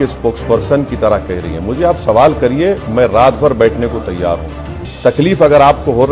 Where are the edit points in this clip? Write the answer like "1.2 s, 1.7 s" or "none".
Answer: none

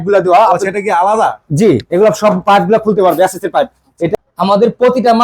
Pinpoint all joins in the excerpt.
4.1 s

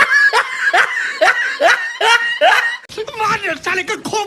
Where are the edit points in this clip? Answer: 2.9 s

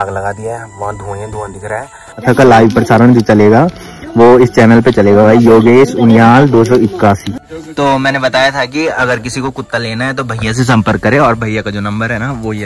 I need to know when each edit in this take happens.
2.2 s, 7.3 s

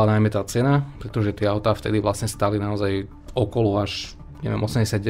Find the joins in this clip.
3.2 s

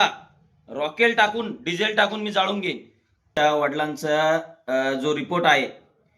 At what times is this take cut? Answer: 3.3 s

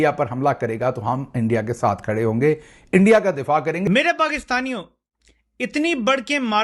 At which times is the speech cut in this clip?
3.8 s

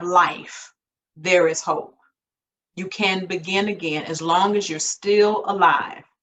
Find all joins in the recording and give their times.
none

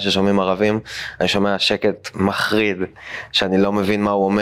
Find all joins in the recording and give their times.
none

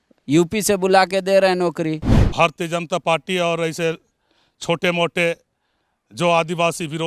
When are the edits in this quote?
2.0 s

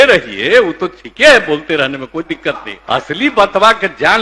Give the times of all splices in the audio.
2.7 s

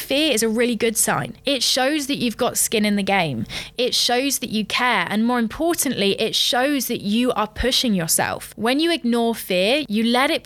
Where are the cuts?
8.5 s

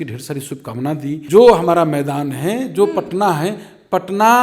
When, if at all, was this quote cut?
1.2 s

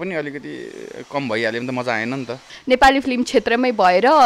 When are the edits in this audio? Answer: 2.6 s

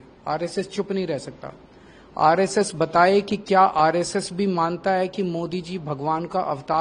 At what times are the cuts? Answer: none

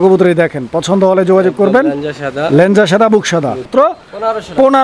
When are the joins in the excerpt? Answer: 3.7 s

